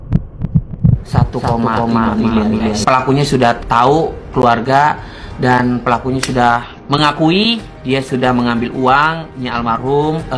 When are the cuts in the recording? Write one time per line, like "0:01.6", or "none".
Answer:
none